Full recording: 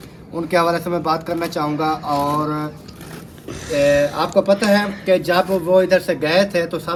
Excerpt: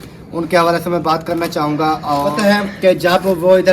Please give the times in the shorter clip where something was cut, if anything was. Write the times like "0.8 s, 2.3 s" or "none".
2.3 s